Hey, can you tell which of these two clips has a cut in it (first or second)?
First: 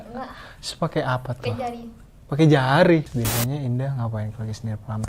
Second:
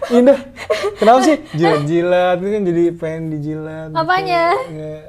first